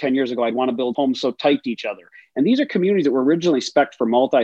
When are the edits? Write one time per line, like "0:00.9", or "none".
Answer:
0:00.9

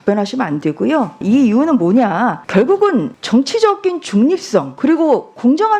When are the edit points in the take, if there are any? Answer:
0:01.2
0:02.4
0:03.2
0:04.7

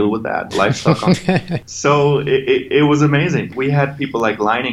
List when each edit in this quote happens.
0:01.6
0:03.5

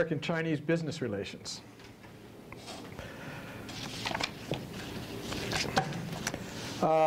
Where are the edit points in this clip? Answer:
none

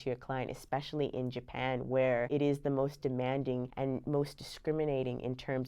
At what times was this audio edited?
0:02.3
0:03.7

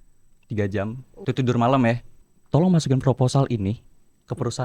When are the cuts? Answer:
0:01.1
0:02.1

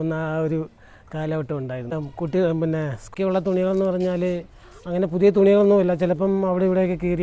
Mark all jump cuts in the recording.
0:01.9
0:03.0

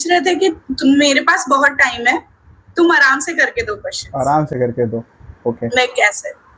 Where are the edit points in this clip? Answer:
none

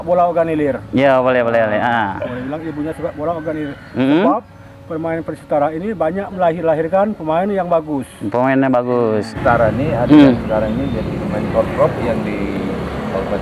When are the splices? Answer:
0:09.3

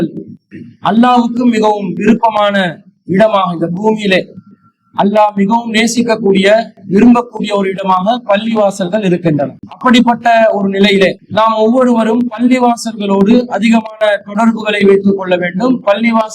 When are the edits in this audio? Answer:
0:09.6
0:11.2

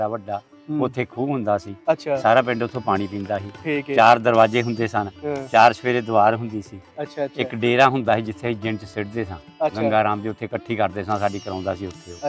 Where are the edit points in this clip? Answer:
none

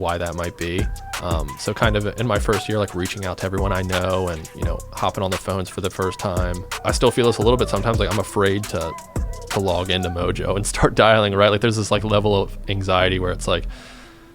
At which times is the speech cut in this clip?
0:06.7

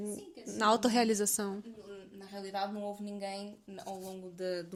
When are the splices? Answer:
none

